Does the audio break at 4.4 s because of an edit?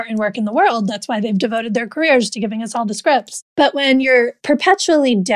yes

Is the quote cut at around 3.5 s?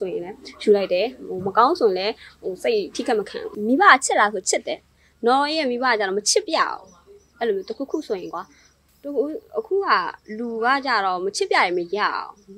yes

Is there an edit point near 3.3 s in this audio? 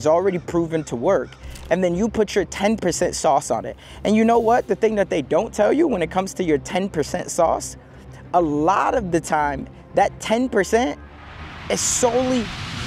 no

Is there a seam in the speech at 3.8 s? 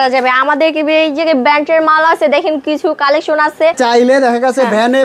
yes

